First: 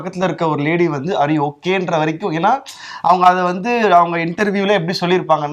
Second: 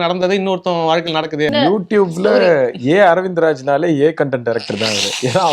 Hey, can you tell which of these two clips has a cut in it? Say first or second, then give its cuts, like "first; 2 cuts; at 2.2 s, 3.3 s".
second; 1 cut; at 1.5 s